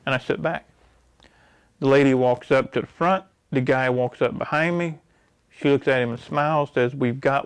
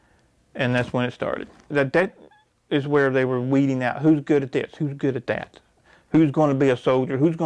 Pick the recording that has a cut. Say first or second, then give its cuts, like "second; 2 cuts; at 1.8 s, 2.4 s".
second; 1 cut; at 1.7 s